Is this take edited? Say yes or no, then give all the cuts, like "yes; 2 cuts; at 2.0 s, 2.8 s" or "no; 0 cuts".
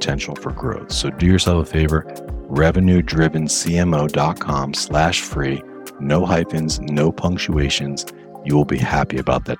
no; 0 cuts